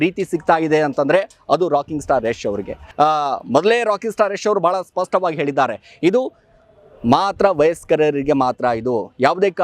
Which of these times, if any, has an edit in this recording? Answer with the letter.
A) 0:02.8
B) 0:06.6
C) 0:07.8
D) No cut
A